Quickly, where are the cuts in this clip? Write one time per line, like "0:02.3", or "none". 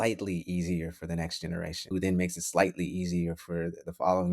0:01.8